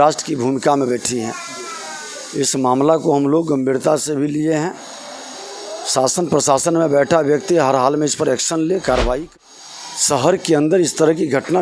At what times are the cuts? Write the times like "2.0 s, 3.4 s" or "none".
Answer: 9.2 s